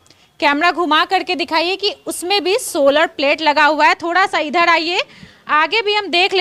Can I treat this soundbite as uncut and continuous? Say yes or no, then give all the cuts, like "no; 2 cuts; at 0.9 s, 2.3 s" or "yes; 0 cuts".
yes; 0 cuts